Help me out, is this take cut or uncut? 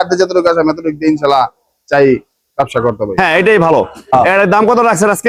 uncut